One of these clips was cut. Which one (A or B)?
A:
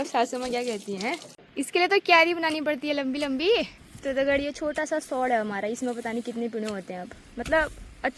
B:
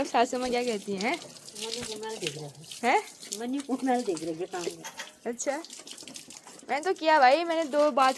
A